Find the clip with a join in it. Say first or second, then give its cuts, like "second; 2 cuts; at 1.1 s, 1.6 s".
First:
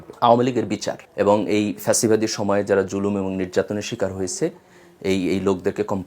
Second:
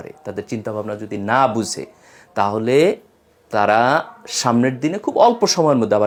first; 1 cut; at 1.0 s